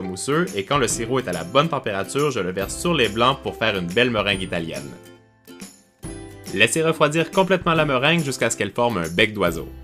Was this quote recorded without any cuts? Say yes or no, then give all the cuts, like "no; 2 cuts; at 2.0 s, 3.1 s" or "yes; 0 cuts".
yes; 0 cuts